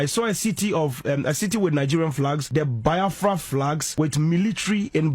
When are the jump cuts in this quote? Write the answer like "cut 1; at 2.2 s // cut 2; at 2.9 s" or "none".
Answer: cut 1; at 2.4 s // cut 2; at 3.8 s